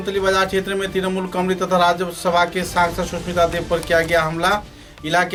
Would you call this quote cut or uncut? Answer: uncut